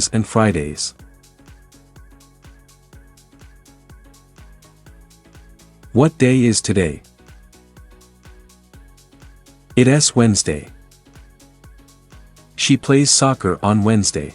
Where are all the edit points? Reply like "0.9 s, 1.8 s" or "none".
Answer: 0.8 s, 5.9 s, 7.0 s, 9.7 s